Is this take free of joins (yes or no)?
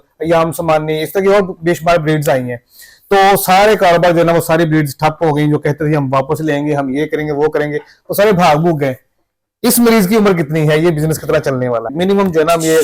no